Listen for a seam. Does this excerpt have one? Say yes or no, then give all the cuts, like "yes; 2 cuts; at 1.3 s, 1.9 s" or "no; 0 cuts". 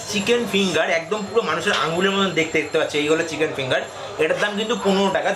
no; 0 cuts